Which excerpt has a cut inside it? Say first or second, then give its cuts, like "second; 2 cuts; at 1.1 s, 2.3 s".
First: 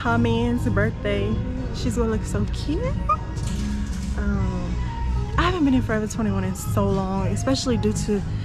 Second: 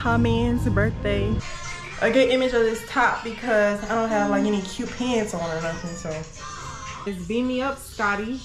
second; 2 cuts; at 1.5 s, 7.1 s